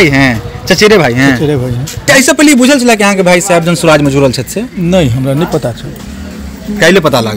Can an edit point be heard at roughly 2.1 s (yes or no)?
yes